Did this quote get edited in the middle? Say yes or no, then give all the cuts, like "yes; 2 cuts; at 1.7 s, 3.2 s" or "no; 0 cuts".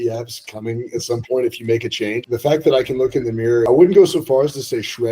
yes; 2 cuts; at 2.2 s, 3.7 s